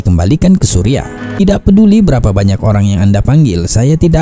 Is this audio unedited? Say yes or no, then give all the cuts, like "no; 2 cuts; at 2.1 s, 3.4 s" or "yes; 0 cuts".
no; 1 cut; at 1.4 s